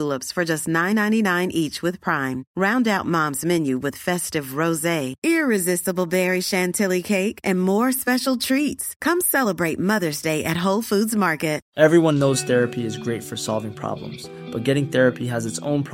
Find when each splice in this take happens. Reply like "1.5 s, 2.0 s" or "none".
11.6 s